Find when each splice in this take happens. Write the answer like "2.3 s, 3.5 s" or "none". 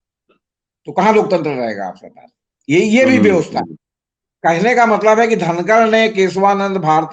none